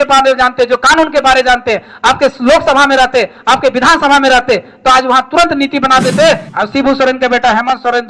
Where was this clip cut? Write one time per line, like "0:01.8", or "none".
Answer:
0:06.5